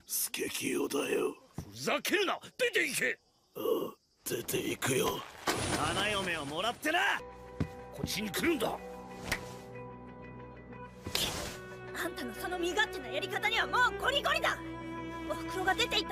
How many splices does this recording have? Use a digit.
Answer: 1